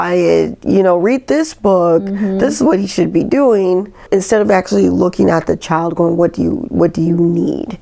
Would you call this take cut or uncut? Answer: cut